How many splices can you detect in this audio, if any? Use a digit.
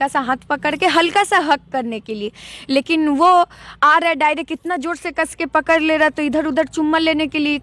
0